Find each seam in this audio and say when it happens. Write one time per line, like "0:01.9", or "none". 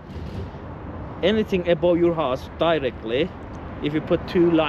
none